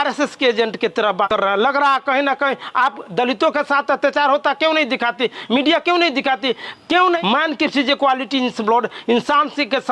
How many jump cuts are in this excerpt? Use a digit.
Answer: 2